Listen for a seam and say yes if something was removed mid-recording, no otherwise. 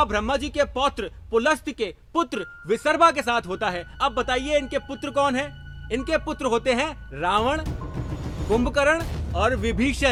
no